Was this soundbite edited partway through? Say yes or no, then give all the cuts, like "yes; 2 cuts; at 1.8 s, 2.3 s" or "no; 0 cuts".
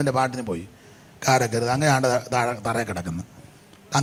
no; 0 cuts